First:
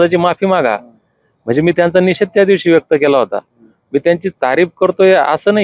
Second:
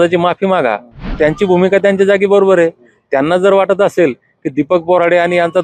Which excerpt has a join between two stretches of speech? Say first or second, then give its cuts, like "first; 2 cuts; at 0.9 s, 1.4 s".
second; 1 cut; at 1.1 s